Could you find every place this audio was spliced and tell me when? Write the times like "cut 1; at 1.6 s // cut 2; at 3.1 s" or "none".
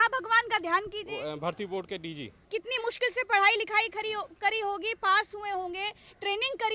cut 1; at 2.4 s